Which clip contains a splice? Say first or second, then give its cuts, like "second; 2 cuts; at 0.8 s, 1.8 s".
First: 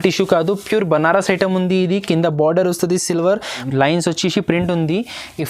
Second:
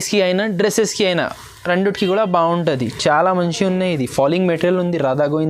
first; 1 cut; at 3.6 s